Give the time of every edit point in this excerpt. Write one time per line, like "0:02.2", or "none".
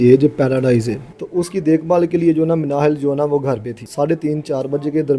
0:01.1
0:03.8